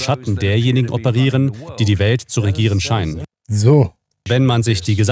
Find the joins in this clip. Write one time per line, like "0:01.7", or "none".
0:03.3
0:04.2